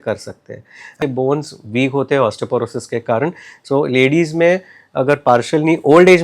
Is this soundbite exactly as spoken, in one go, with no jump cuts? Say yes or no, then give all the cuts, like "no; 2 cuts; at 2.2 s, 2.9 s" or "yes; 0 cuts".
no; 1 cut; at 1.0 s